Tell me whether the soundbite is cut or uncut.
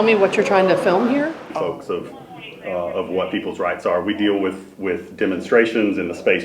cut